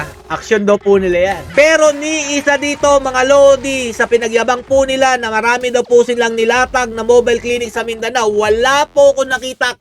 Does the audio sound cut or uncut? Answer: cut